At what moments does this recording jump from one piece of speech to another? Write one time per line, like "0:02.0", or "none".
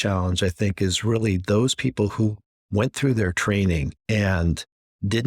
0:03.9